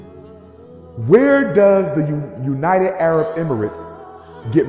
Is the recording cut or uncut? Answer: uncut